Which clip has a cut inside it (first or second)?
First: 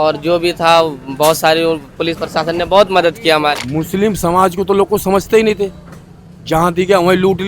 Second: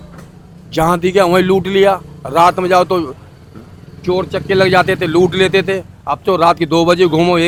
first